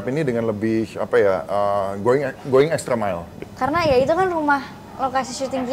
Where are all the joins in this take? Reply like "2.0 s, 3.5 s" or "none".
3.4 s